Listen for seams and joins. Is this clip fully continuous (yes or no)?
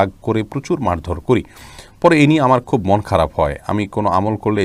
yes